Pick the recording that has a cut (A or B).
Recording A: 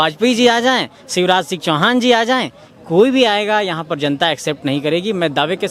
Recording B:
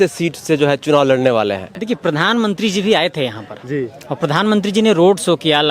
B